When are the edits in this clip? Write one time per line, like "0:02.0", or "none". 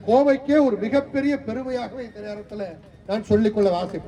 none